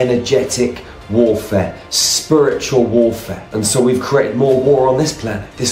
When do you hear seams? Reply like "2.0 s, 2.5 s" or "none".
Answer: 3.4 s